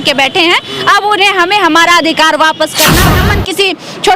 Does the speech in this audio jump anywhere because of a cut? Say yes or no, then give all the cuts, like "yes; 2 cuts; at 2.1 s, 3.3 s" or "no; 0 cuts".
yes; 1 cut; at 3.1 s